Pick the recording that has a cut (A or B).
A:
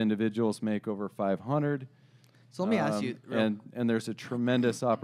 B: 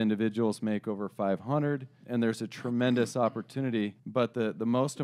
B